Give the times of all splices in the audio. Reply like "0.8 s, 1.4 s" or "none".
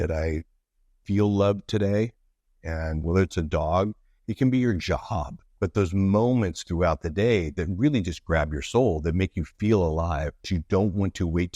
5.4 s, 10.4 s